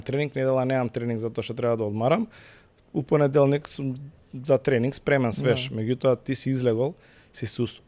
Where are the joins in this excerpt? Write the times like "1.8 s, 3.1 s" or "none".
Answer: none